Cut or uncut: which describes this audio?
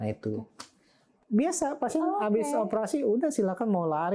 cut